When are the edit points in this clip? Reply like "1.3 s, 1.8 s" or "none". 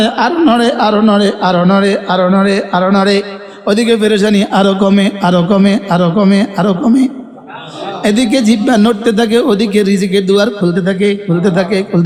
none